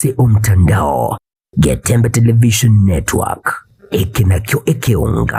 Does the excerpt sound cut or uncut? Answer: uncut